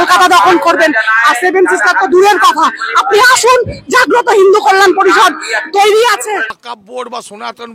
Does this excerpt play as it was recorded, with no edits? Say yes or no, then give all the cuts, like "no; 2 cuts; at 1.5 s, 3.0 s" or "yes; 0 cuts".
no; 1 cut; at 6.5 s